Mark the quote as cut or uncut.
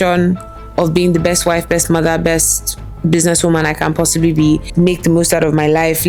uncut